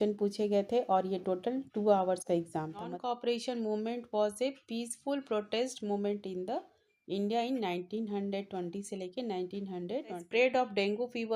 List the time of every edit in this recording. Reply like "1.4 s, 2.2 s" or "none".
2.9 s, 10.2 s